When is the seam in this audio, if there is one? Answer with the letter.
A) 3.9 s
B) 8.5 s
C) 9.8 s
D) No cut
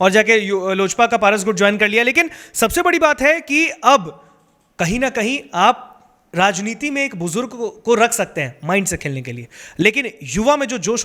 D